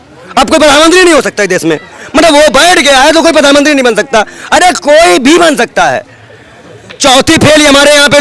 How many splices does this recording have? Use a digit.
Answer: 0